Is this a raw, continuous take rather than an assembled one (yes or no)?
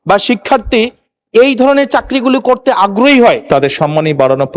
no